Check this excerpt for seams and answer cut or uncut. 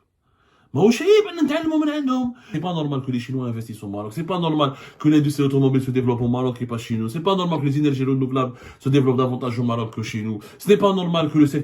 cut